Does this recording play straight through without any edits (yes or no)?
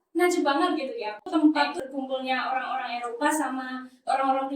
no